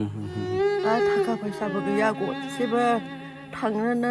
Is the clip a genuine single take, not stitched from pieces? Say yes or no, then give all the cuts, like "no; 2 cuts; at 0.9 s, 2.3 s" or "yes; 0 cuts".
yes; 0 cuts